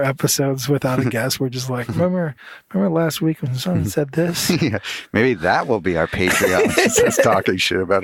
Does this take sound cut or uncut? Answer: uncut